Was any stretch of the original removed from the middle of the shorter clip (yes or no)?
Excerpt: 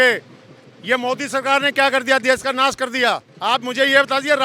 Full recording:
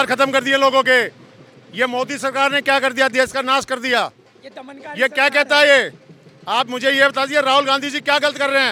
yes